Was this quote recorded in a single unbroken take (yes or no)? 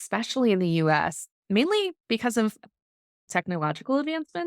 no